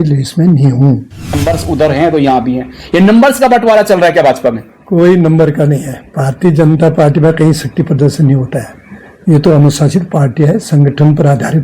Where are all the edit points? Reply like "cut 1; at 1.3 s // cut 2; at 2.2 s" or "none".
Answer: cut 1; at 1.4 s